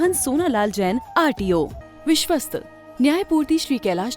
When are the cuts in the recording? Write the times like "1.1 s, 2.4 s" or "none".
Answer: 1.8 s